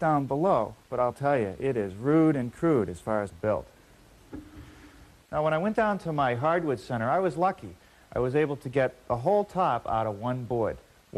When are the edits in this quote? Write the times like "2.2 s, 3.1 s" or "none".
none